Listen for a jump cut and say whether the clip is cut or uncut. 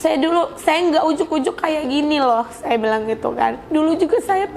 cut